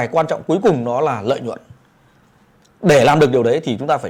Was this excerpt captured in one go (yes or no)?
yes